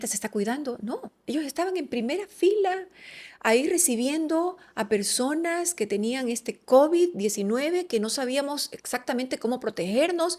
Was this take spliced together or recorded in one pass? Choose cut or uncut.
uncut